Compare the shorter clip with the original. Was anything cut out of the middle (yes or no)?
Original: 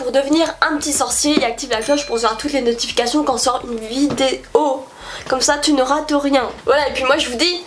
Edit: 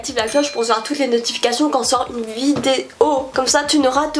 yes